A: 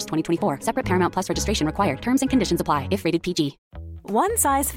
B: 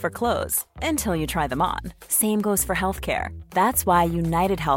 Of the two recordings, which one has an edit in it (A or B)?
A